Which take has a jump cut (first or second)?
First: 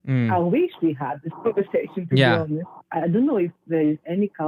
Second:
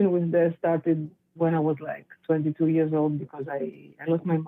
first